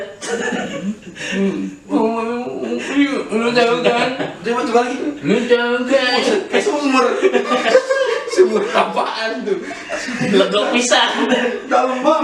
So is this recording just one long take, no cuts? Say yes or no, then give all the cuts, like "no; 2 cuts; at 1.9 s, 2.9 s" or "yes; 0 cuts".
yes; 0 cuts